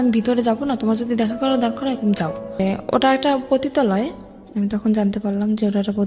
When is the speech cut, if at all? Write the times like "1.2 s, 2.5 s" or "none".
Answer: 2.6 s